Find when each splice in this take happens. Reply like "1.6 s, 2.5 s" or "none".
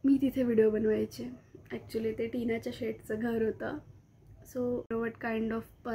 4.9 s